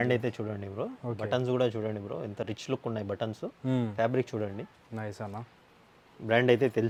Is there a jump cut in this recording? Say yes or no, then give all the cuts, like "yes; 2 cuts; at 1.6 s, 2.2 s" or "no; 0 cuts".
no; 0 cuts